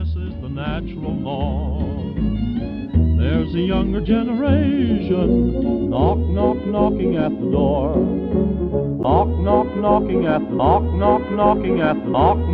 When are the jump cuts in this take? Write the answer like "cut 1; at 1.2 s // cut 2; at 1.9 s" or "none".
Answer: none